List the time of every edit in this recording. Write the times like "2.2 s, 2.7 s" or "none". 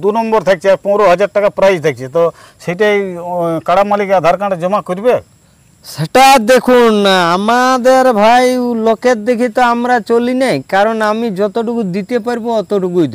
none